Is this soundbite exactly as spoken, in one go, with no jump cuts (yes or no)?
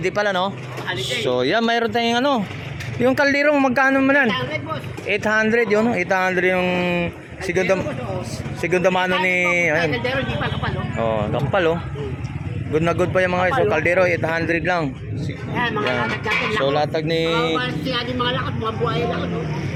yes